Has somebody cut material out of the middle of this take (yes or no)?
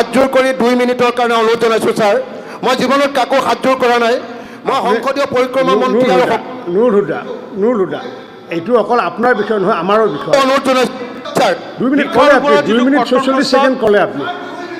no